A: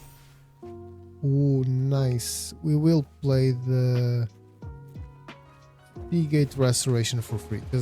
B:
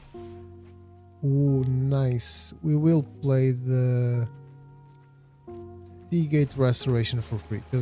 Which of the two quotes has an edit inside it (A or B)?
B